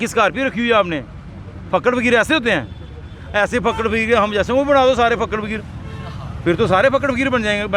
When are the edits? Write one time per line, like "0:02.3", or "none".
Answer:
none